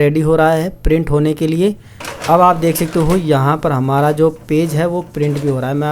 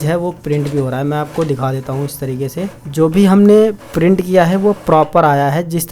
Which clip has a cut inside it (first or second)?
second